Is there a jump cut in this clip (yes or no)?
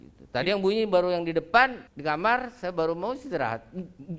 yes